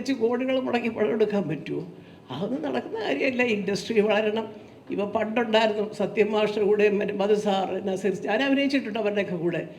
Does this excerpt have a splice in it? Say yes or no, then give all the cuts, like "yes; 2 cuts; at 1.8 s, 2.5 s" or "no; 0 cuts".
no; 0 cuts